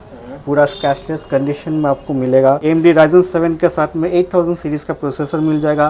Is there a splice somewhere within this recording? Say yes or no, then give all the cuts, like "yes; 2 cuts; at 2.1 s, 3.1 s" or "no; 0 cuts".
yes; 1 cut; at 2.6 s